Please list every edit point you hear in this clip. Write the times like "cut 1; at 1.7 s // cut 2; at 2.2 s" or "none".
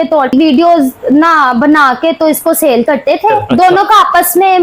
cut 1; at 3.4 s